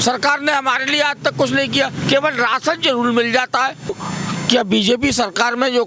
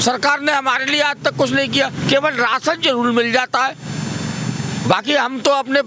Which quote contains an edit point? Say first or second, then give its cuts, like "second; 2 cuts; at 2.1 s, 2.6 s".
first; 1 cut; at 4.0 s